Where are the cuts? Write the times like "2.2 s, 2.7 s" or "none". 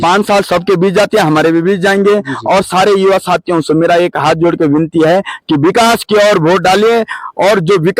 none